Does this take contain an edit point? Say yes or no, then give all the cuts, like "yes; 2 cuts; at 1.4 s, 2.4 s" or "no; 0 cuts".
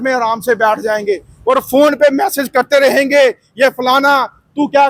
no; 0 cuts